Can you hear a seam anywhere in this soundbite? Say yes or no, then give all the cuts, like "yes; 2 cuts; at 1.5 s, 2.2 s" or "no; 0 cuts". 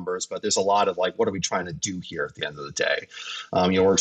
no; 0 cuts